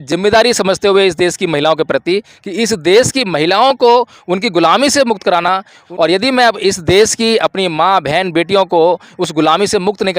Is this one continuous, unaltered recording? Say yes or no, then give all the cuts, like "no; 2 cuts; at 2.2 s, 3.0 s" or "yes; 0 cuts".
no; 1 cut; at 5.8 s